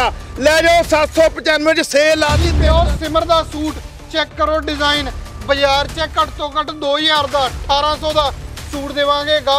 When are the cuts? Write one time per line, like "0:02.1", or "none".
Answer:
0:02.5